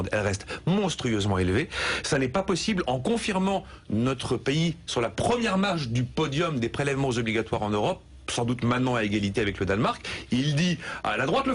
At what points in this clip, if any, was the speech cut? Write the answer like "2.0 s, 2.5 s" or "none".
none